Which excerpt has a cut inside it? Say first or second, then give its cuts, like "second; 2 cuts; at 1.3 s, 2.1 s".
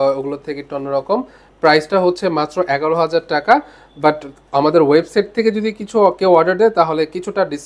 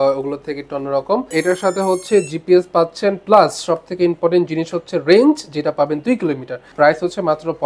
second; 2 cuts; at 1.3 s, 6.6 s